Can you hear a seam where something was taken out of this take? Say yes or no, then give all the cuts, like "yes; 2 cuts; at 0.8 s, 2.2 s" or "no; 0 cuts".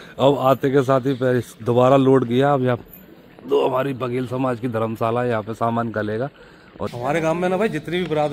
yes; 1 cut; at 6.9 s